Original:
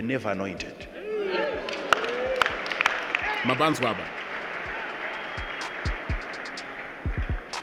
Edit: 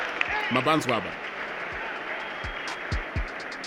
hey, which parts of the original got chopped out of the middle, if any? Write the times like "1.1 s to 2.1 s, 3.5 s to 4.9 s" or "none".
none